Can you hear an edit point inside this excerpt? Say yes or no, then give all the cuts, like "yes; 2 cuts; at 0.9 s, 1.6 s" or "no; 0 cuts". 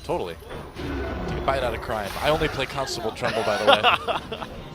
yes; 1 cut; at 1.6 s